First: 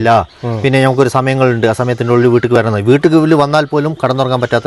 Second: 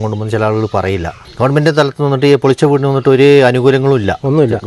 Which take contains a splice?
second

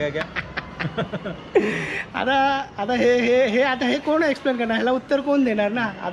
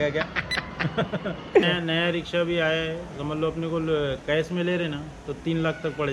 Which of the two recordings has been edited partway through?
second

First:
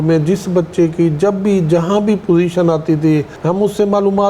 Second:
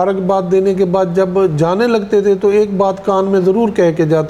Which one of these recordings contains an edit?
first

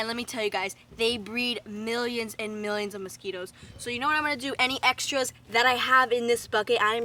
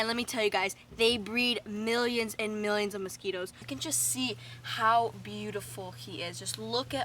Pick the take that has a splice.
second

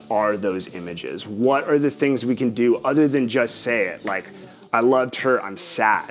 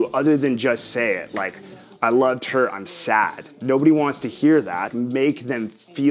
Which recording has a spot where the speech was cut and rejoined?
second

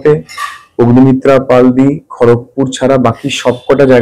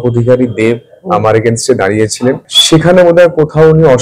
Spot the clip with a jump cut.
second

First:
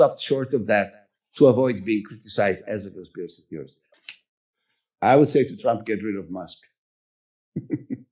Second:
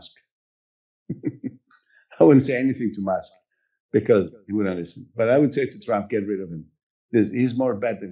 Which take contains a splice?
first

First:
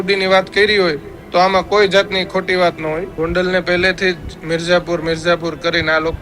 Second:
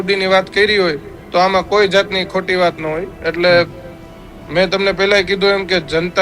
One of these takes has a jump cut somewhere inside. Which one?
first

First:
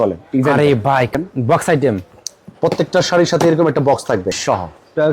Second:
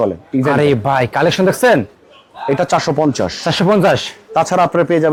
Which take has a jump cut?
first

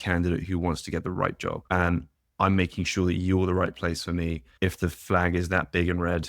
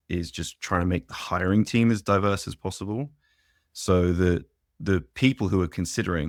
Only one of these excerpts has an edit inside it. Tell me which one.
first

